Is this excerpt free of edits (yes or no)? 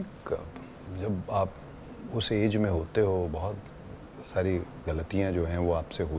yes